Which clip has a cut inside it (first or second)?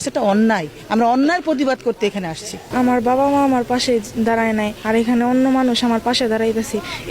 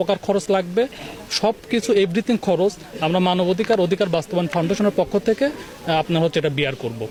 first